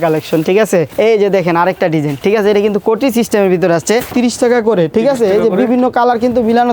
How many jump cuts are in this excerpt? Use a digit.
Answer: 3